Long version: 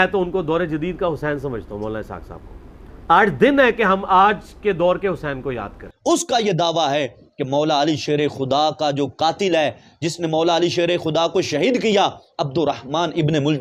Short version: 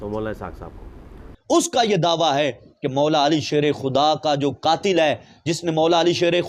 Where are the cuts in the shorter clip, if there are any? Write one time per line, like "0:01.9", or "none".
0:01.2

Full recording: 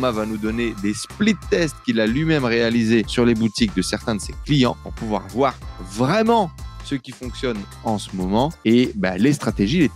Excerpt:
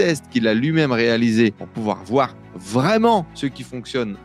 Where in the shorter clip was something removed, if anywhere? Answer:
0:01.6
0:03.3

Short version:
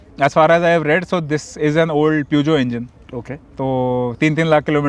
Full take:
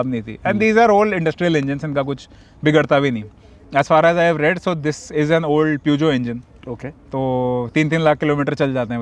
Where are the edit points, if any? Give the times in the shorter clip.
none

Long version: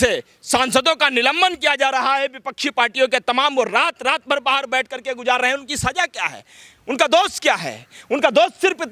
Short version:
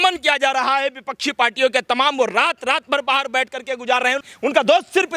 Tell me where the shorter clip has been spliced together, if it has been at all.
0:04.3

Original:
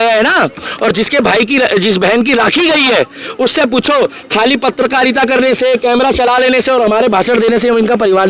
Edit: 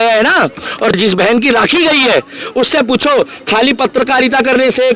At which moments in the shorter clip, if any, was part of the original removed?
0:01.0

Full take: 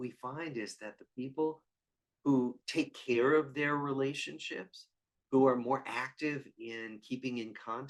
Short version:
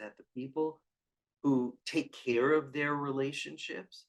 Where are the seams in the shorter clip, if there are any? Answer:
none

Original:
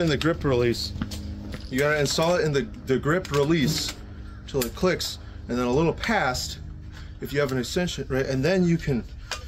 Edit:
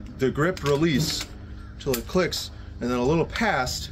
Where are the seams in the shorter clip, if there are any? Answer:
none

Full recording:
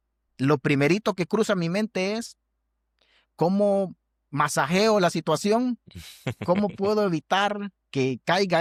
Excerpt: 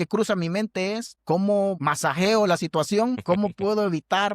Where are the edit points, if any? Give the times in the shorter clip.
0:01.1
0:01.8
0:03.2

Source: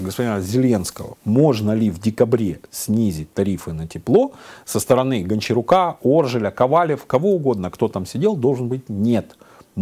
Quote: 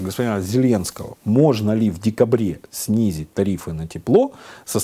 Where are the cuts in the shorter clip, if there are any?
none

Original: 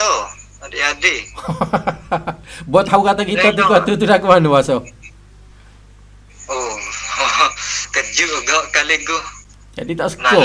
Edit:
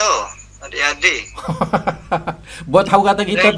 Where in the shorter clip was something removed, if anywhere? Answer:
none

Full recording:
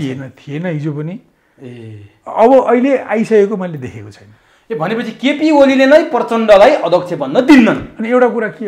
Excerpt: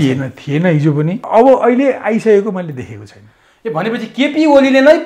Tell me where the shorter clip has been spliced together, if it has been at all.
0:01.2

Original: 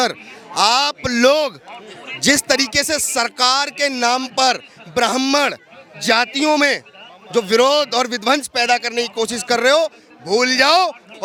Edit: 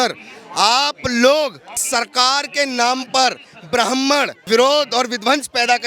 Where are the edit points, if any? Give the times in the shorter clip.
0:01.8
0:04.5

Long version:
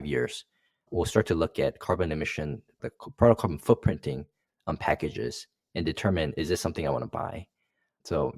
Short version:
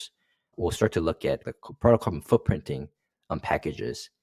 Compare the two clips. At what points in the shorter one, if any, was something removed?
0:01.4

